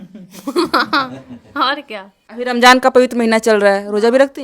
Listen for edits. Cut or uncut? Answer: cut